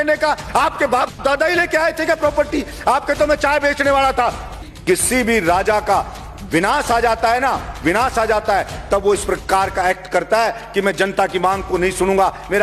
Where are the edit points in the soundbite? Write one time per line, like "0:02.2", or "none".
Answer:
0:04.7